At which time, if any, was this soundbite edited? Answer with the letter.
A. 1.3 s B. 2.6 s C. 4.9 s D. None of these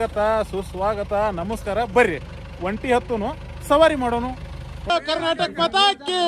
C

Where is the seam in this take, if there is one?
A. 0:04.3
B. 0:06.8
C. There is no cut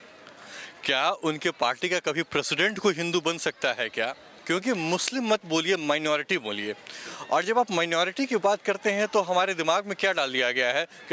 A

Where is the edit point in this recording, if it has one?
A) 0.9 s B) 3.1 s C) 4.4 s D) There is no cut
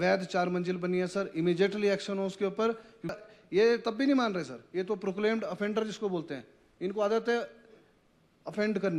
B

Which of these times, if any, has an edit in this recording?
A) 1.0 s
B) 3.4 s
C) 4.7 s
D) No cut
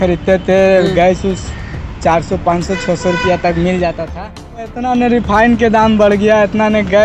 C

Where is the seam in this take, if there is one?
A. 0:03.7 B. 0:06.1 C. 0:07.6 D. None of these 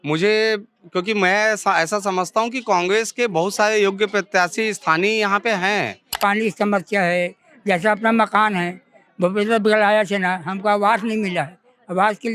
B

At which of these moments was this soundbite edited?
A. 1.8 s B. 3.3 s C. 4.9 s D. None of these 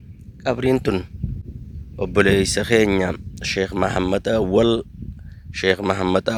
D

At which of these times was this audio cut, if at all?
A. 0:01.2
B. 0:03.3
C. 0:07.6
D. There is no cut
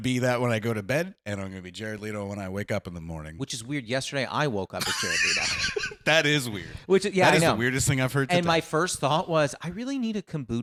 D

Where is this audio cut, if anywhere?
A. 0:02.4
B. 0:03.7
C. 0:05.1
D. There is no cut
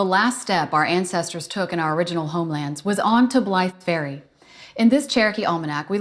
D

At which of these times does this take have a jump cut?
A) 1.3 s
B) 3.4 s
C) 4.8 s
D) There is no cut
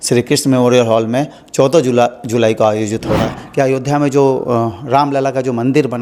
B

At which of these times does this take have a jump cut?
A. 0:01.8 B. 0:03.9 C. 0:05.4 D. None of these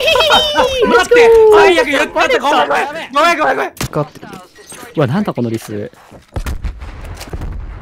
B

